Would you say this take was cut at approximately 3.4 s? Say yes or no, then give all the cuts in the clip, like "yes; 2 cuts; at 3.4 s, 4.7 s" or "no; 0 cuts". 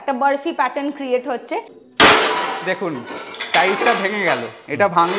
no; 1 cut; at 1.8 s